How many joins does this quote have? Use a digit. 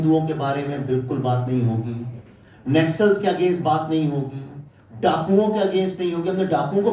0